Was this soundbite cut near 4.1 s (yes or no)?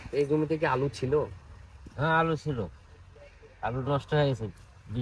no